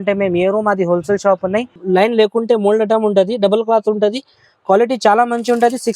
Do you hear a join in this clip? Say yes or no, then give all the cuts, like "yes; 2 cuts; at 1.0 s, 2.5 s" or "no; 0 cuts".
yes; 1 cut; at 1.8 s